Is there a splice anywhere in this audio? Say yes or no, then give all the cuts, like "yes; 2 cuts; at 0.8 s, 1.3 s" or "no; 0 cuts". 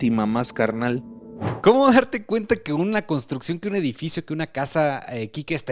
yes; 1 cut; at 1.5 s